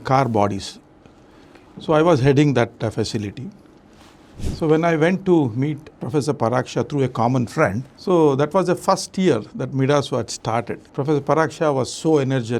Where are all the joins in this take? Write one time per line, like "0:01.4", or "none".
0:06.0
0:07.9
0:10.8